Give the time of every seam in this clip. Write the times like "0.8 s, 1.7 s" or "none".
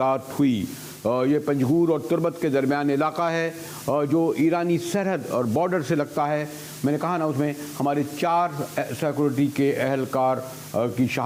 none